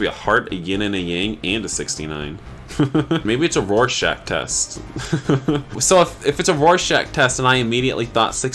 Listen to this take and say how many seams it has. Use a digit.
2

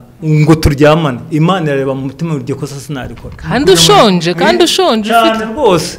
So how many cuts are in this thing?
0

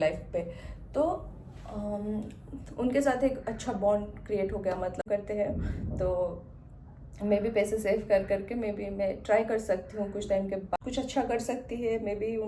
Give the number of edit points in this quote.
2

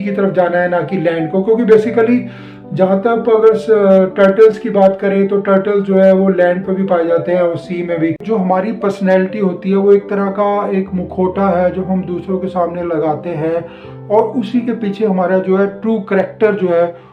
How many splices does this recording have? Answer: 1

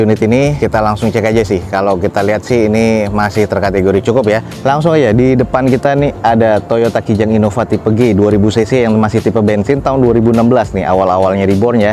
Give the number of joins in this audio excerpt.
0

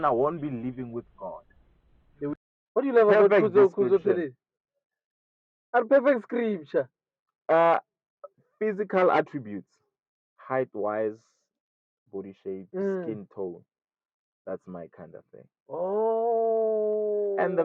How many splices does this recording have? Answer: 1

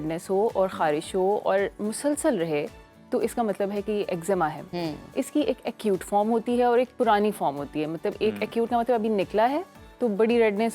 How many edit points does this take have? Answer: 0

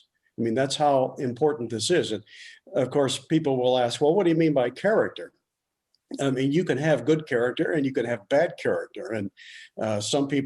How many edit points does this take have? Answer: 0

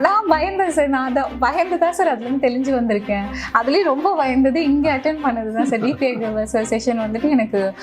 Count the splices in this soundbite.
0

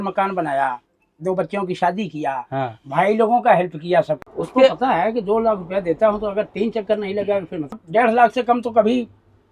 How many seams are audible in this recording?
2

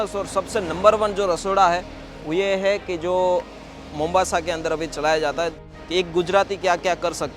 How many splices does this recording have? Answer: 1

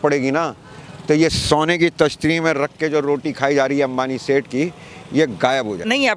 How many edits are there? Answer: 0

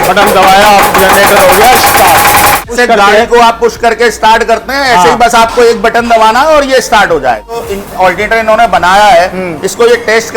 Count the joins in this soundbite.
2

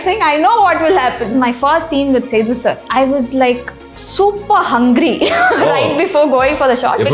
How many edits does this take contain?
2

